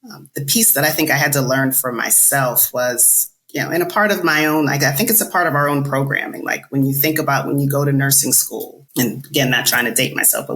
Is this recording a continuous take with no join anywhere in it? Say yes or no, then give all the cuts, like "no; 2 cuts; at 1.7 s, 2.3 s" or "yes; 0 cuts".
no; 1 cut; at 8.8 s